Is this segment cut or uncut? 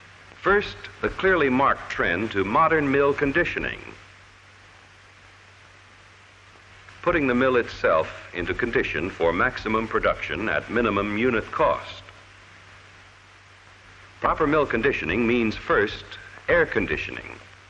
cut